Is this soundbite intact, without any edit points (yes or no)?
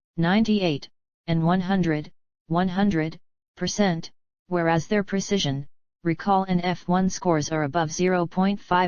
no